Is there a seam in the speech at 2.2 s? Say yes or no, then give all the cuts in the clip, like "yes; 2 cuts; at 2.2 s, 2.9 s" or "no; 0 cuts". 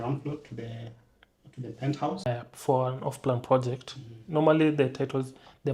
yes; 1 cut; at 2.2 s